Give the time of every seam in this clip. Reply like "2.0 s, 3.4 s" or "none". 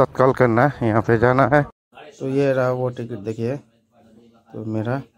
1.8 s

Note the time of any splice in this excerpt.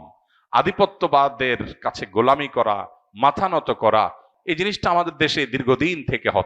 4.3 s

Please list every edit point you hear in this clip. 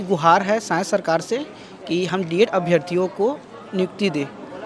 none

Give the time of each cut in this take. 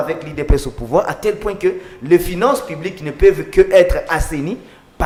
none

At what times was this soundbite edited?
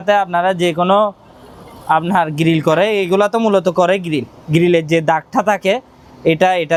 none

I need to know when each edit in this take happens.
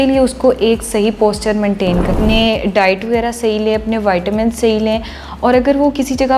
2.1 s

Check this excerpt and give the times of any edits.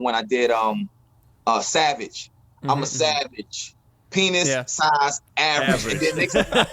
none

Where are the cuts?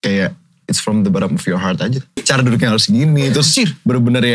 2.2 s

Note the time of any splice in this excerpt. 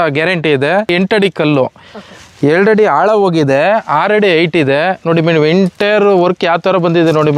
0.9 s

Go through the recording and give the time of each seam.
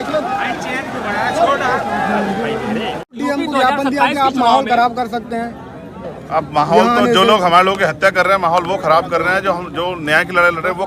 3.1 s

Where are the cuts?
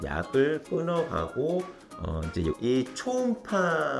2.6 s

